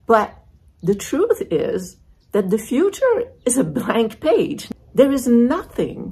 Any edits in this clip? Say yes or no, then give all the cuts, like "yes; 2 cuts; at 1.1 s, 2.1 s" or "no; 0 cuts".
yes; 1 cut; at 4.6 s